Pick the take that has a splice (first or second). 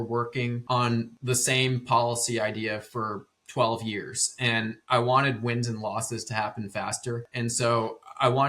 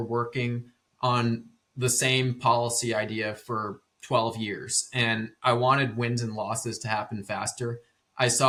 first